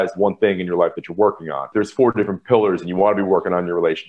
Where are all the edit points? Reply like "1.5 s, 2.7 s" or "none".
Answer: 1.7 s